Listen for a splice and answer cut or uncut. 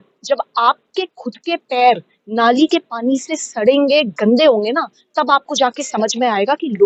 uncut